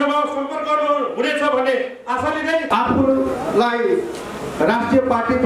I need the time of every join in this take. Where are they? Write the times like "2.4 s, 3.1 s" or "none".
2.7 s